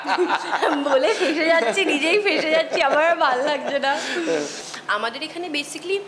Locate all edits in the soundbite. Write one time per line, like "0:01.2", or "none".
0:04.6